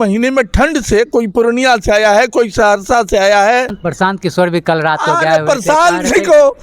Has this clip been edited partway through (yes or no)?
yes